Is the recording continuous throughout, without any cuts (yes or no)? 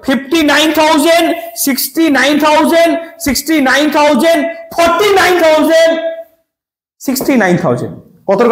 yes